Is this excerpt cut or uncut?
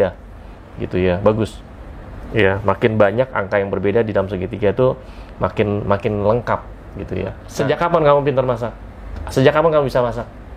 cut